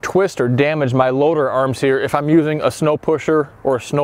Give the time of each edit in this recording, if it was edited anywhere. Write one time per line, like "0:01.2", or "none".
none